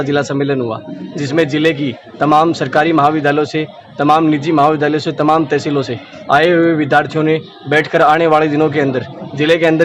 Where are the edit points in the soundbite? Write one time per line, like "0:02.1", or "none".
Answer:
none